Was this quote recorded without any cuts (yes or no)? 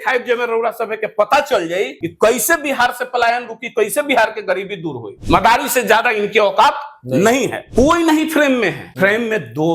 no